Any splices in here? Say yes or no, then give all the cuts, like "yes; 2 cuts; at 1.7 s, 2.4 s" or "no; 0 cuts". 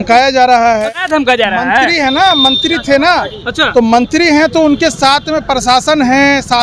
yes; 1 cut; at 1.2 s